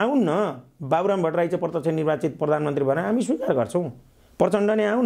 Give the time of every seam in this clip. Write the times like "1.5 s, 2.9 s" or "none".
none